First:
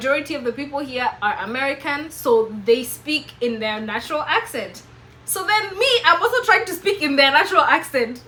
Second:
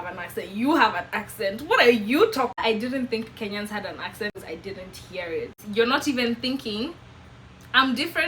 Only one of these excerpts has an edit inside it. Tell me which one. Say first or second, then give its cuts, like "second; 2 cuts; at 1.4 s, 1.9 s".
second; 3 cuts; at 2.6 s, 4.3 s, 5.6 s